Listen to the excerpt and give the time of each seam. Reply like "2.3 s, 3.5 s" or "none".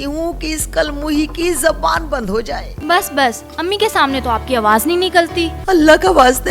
2.7 s, 5.5 s